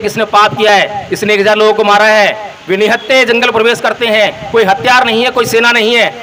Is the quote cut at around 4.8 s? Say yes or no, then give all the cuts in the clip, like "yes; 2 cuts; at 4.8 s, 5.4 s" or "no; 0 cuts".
no; 0 cuts